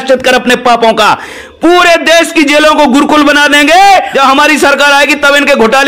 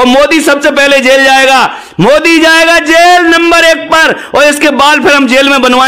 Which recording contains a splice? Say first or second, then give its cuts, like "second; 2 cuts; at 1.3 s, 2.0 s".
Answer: first; 2 cuts; at 1.4 s, 4.1 s